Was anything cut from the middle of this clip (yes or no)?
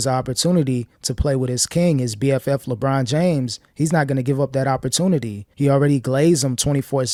no